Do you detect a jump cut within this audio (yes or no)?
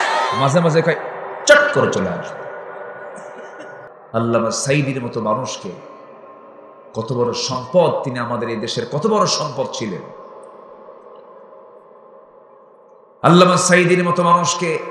yes